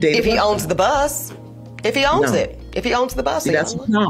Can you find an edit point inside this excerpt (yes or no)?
no